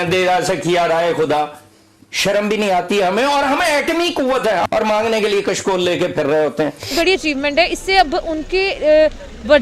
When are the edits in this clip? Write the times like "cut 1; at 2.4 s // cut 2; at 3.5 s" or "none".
cut 1; at 4.7 s // cut 2; at 6.9 s